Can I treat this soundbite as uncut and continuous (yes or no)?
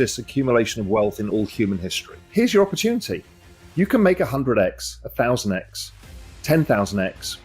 no